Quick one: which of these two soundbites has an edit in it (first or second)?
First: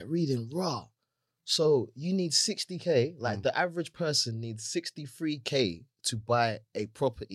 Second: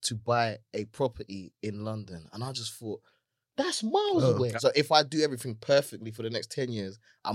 second